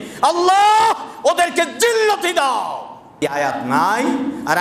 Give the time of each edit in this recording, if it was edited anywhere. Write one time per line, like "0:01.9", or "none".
0:03.3